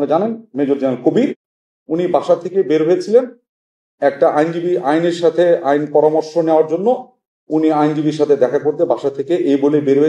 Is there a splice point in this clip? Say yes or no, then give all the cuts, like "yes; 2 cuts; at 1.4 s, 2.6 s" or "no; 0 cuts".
yes; 1 cut; at 1.4 s